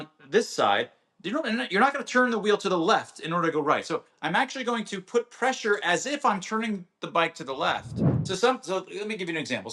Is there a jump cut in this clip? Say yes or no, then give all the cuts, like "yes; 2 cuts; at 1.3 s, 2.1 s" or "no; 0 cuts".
yes; 1 cut; at 8.1 s